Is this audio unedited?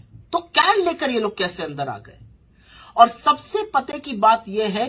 yes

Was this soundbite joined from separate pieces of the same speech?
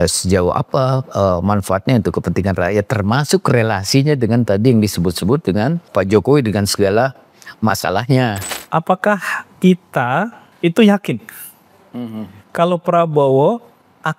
yes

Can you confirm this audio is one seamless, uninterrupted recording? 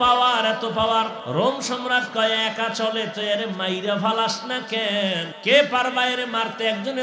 no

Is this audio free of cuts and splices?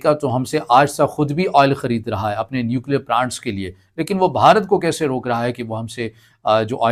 yes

